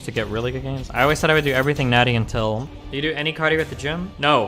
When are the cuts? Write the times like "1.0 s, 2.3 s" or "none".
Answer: 2.7 s